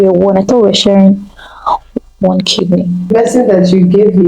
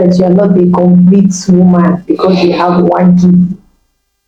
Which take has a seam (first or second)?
first